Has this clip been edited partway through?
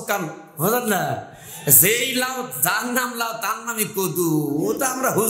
no; 0 cuts

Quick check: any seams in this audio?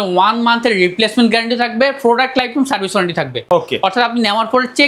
no; 0 cuts

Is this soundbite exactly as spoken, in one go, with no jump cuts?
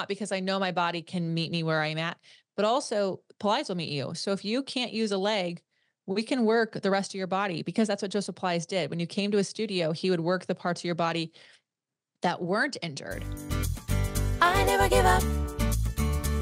no; 1 cut; at 13.4 s

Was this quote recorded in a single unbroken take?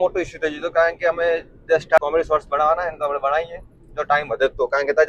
no; 1 cut; at 2.0 s

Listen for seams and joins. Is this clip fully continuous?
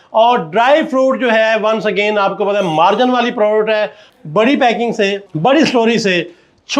no; 2 cuts; at 4.0 s, 5.3 s

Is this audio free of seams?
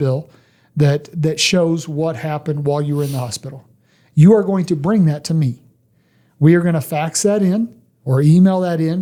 yes; 0 cuts

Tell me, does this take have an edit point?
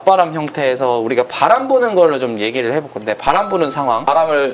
no; 0 cuts

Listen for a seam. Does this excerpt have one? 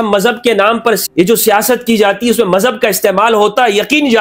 no; 0 cuts

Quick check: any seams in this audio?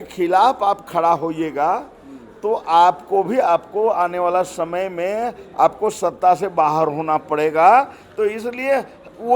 no; 0 cuts

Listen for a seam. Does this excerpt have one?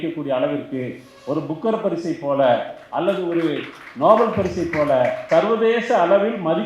yes; 1 cut; at 5.2 s

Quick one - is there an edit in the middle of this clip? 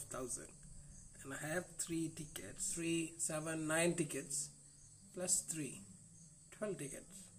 yes; 1 cut; at 2.7 s

